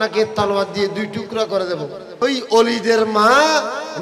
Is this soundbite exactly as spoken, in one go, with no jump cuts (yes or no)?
no